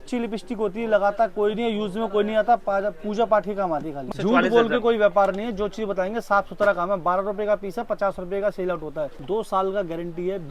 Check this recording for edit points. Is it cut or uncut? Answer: cut